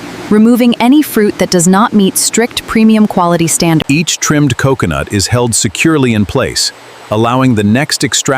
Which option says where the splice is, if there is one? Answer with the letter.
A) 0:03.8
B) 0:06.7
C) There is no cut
A